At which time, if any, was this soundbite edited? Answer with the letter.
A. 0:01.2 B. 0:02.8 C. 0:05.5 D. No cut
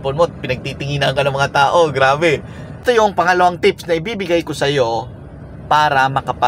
B